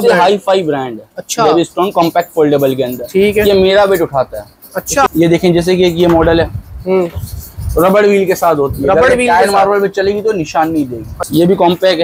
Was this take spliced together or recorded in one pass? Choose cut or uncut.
cut